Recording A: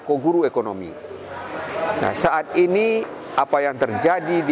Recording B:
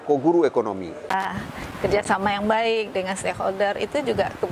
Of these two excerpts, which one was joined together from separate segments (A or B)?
B